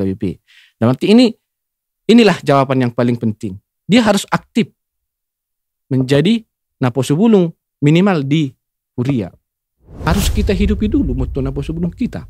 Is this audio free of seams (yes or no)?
no